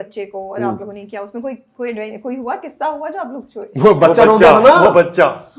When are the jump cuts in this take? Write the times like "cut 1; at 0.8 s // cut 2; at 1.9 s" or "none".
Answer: none